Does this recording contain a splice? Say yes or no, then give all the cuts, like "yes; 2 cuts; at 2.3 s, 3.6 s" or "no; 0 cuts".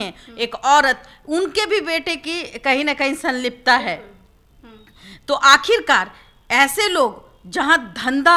no; 0 cuts